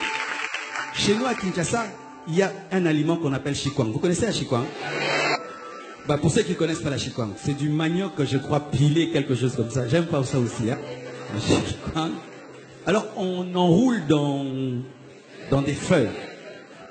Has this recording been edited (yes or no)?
yes